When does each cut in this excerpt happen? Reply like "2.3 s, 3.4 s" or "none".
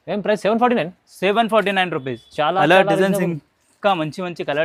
none